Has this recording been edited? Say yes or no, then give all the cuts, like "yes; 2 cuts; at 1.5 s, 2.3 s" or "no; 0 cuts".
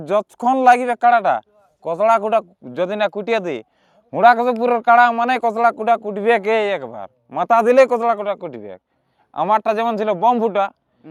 no; 0 cuts